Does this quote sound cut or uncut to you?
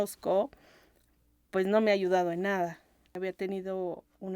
cut